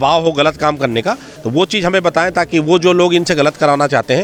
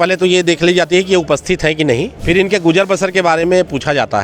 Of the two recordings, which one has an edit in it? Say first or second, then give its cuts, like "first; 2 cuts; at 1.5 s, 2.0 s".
second; 1 cut; at 2.1 s